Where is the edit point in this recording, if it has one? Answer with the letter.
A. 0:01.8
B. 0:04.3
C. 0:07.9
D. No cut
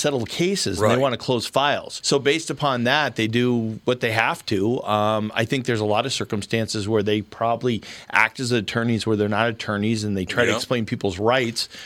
D